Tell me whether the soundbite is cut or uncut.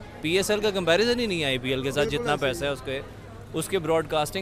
uncut